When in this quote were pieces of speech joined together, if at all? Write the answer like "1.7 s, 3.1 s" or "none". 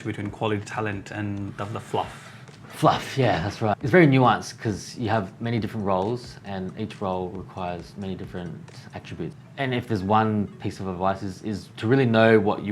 3.7 s, 9.4 s